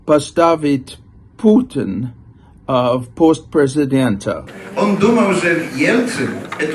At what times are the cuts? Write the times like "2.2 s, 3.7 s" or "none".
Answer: 4.5 s